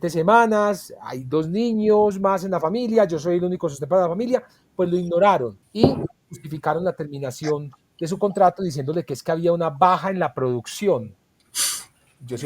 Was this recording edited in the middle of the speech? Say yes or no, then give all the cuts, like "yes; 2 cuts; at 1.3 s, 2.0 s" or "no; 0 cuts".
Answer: yes; 1 cut; at 5.6 s